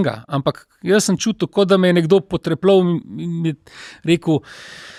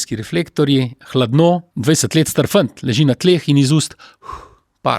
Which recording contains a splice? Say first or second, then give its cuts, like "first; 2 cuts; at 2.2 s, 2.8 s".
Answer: second; 1 cut; at 1.7 s